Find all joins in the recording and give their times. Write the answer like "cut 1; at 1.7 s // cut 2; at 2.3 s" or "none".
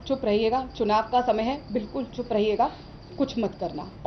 none